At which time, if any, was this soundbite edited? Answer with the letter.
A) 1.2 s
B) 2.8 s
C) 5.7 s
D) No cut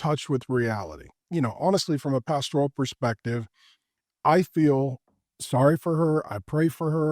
A